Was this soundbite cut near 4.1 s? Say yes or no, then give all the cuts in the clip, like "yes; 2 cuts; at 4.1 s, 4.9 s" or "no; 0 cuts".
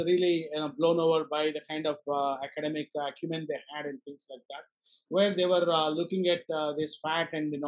no; 0 cuts